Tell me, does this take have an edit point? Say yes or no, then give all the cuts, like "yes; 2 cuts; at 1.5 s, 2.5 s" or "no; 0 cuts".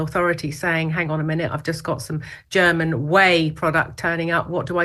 no; 0 cuts